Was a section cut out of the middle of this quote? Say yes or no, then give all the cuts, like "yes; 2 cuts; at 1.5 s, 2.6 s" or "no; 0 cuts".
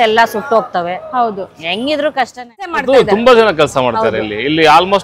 yes; 1 cut; at 2.8 s